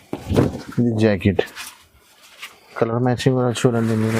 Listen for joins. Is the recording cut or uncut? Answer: uncut